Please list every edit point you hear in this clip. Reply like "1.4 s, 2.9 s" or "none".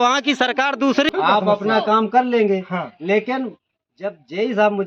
1.1 s